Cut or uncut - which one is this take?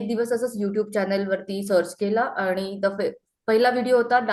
uncut